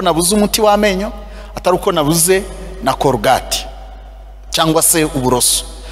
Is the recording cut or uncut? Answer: uncut